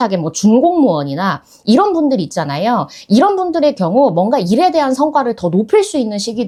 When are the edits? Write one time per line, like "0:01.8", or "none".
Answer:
none